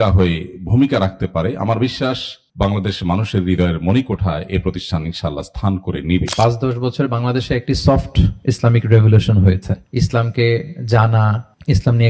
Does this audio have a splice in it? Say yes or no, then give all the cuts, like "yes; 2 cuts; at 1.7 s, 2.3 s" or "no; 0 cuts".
yes; 2 cuts; at 6.3 s, 9.8 s